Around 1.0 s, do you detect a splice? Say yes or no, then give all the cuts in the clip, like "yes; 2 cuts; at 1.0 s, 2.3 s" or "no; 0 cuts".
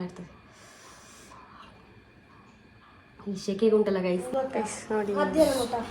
no; 1 cut; at 4.3 s